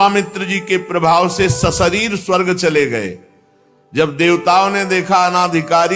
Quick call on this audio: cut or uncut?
uncut